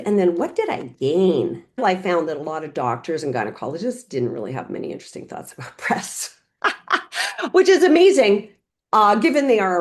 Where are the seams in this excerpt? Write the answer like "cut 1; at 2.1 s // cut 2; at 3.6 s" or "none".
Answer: cut 1; at 1.8 s